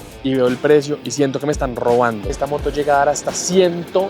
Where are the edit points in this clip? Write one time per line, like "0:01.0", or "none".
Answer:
0:02.3